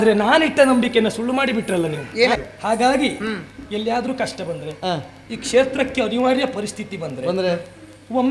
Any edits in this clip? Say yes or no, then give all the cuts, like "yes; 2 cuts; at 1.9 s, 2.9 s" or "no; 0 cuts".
yes; 1 cut; at 2.5 s